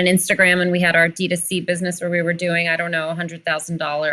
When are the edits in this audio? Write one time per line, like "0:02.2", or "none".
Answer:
none